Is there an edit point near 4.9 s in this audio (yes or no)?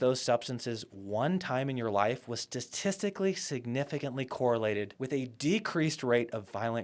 yes